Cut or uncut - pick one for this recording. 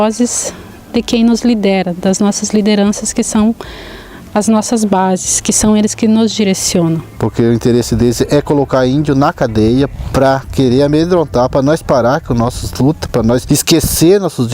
cut